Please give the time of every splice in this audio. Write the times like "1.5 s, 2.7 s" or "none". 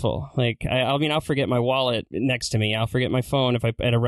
2.1 s